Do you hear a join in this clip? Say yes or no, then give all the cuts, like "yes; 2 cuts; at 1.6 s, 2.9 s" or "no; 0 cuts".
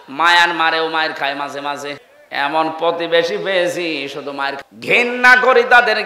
yes; 2 cuts; at 2.1 s, 4.6 s